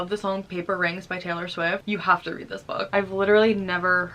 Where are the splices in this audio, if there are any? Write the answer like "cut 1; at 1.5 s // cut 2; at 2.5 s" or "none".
cut 1; at 1.8 s // cut 2; at 2.9 s